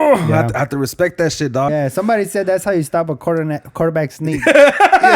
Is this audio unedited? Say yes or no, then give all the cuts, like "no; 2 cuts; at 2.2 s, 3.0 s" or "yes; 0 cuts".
no; 1 cut; at 1.7 s